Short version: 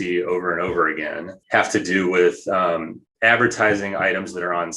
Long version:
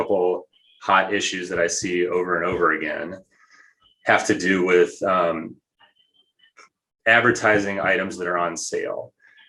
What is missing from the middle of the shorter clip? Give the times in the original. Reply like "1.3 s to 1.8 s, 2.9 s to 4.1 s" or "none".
3.1 s to 3.8 s, 5.6 s to 6.8 s